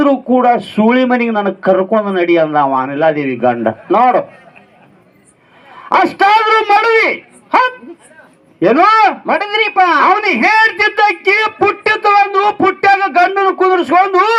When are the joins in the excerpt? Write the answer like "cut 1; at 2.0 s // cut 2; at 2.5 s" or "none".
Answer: none